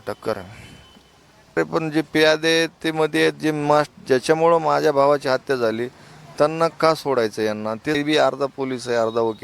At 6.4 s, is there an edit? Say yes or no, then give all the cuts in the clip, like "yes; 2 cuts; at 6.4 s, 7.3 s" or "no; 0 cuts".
no; 2 cuts; at 1.6 s, 8.0 s